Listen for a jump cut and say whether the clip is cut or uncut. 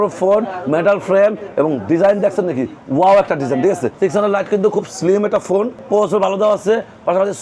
cut